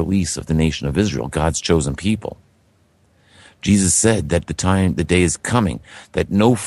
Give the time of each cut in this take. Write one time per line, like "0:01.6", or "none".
0:01.1